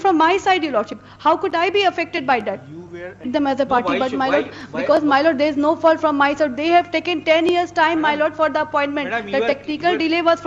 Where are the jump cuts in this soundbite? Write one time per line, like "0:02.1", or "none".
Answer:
0:03.3